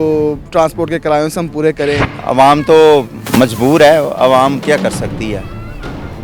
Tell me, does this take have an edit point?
yes; 1 cut; at 2.1 s

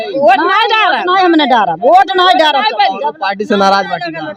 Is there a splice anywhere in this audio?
no; 0 cuts

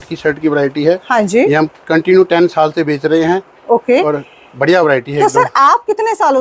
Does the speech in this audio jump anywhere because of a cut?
no; 0 cuts

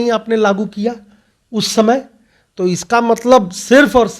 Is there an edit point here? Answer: no; 0 cuts

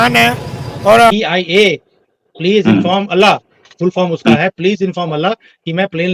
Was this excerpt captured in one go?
no; 1 cut; at 1.1 s

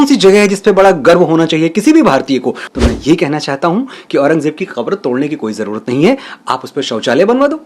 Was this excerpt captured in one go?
no; 1 cut; at 2.6 s

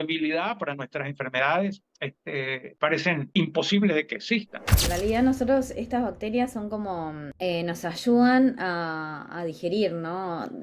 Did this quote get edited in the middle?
yes; 4 cuts; at 2.6 s, 3.3 s, 4.7 s, 7.2 s

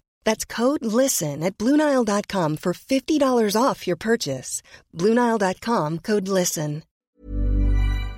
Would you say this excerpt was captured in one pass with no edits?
no; 1 cut; at 7.0 s

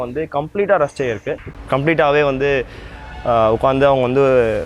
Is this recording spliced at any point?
yes; 1 cut; at 1.4 s

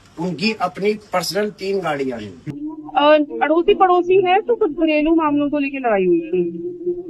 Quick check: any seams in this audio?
yes; 1 cut; at 2.3 s

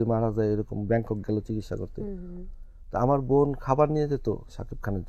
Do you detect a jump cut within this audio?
no; 0 cuts

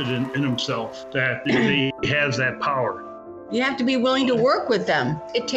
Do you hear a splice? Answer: yes; 2 cuts; at 1.2 s, 3.4 s

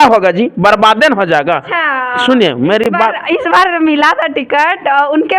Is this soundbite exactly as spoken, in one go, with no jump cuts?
yes; 0 cuts

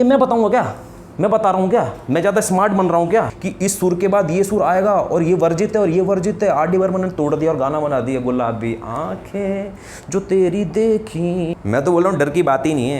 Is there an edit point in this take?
yes; 2 cuts; at 3.4 s, 11.6 s

